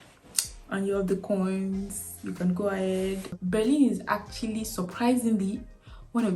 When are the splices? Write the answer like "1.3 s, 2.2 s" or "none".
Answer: 3.3 s